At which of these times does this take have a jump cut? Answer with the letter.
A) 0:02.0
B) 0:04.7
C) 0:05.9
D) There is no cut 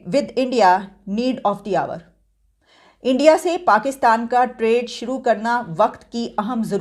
D